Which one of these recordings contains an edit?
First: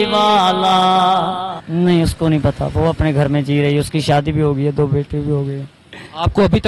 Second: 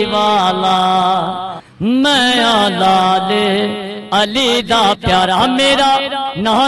first; 1 cut; at 1.6 s

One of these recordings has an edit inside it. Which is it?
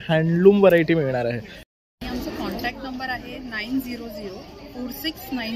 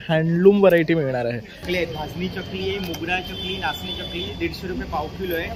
second; 1 cut; at 1.6 s

